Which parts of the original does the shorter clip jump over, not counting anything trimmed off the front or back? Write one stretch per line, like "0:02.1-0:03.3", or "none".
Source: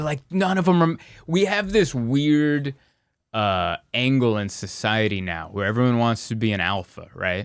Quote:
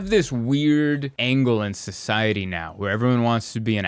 0:02.8-0:03.9